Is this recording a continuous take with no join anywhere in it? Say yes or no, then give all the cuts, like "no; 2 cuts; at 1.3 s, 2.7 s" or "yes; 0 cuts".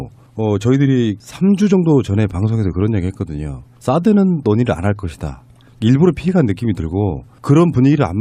no; 1 cut; at 6.3 s